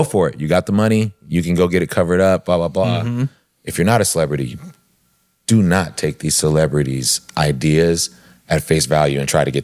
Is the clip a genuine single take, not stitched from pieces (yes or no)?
yes